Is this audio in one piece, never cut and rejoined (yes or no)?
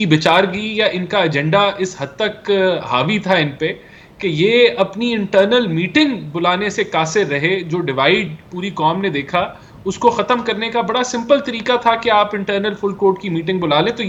yes